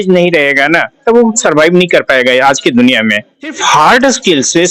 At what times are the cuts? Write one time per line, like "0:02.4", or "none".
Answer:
0:03.6